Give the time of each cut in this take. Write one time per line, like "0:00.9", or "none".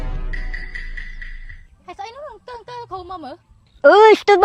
none